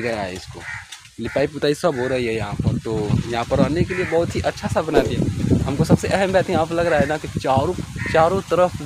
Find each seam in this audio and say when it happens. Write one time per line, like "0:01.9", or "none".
0:05.5